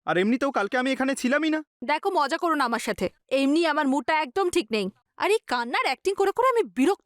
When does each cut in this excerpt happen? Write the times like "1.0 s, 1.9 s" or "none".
1.7 s